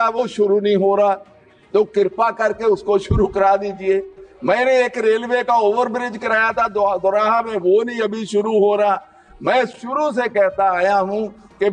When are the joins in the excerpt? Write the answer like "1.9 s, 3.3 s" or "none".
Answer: none